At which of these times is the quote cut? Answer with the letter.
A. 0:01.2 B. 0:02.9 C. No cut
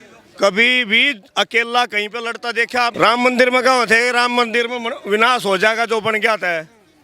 B